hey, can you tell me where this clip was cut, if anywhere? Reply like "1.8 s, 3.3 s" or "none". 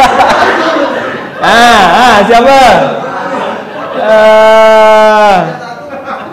none